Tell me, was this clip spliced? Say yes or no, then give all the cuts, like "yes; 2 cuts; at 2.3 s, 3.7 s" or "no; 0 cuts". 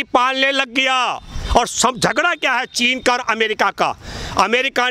no; 0 cuts